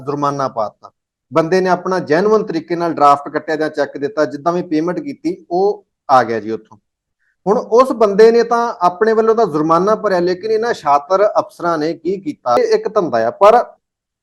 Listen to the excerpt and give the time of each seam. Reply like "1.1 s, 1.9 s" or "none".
12.6 s